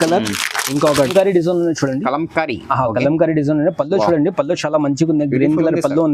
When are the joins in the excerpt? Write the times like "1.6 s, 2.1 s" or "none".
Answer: 1.1 s